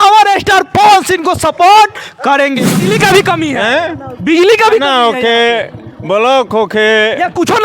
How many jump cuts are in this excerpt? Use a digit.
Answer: 1